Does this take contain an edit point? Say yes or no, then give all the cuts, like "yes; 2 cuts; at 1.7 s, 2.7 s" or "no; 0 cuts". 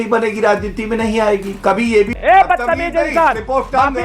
yes; 1 cut; at 2.1 s